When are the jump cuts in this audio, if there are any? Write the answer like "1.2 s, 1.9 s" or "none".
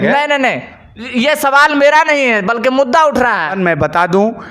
3.6 s